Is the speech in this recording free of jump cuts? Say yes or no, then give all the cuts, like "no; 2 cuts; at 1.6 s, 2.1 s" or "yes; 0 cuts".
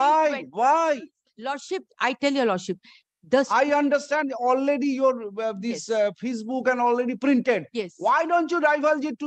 yes; 0 cuts